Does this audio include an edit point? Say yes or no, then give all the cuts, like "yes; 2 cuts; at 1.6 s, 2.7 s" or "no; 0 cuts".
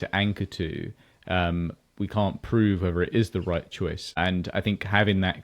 yes; 1 cut; at 4.0 s